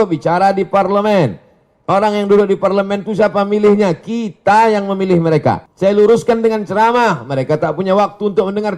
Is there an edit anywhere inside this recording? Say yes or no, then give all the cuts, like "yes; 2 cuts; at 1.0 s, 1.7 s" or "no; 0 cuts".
yes; 1 cut; at 5.7 s